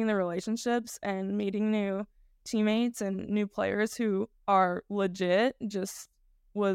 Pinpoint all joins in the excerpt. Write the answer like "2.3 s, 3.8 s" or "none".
4.3 s